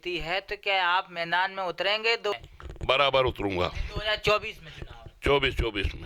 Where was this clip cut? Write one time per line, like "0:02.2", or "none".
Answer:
0:02.3